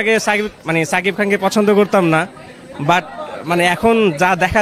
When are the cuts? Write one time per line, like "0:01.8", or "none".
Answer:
none